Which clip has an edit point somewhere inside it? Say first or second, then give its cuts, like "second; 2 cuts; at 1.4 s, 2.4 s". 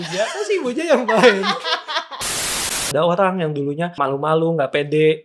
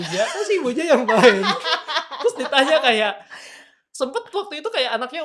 first; 2 cuts; at 2.4 s, 4.0 s